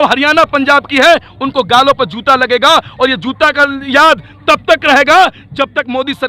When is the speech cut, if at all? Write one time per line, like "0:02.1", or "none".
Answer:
none